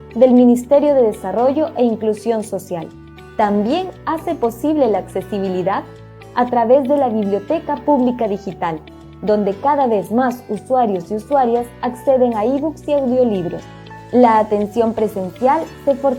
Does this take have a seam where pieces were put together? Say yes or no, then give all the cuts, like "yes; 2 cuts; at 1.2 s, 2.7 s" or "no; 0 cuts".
yes; 1 cut; at 14.6 s